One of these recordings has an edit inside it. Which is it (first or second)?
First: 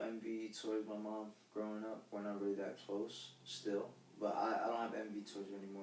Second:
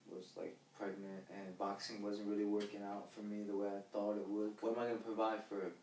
second